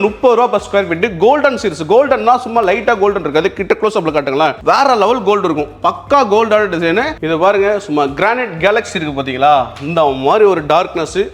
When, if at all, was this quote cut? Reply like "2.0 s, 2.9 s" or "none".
7.2 s